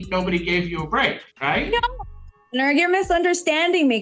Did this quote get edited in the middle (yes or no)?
yes